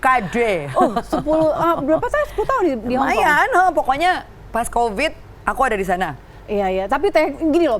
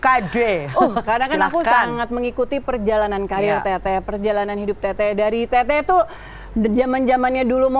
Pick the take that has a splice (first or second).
second